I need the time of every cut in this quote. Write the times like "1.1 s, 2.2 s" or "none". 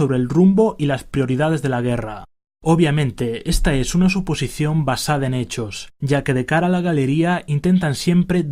4.7 s